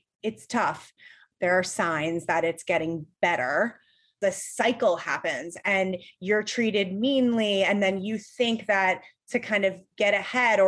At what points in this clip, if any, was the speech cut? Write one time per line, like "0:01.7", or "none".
0:00.9
0:04.2

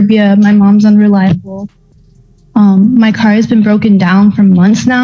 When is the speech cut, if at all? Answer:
none

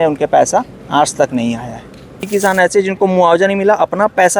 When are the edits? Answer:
0:02.3

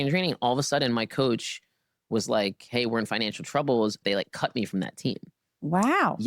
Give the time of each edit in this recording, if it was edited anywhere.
0:04.0

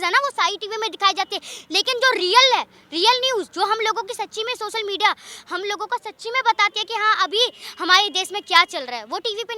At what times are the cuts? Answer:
none

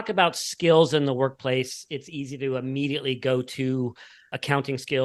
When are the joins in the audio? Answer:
none

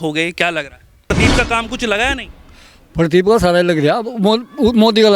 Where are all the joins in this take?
0:01.1

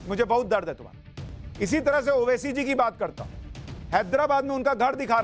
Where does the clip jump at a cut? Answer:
0:01.0

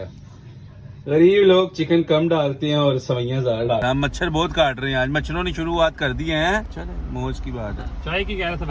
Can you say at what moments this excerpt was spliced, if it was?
0:03.8
0:06.7

